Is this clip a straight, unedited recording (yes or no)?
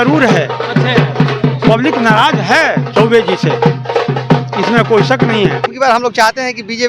no